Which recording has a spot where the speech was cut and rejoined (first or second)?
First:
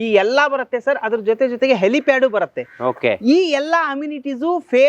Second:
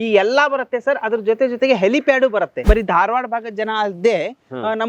second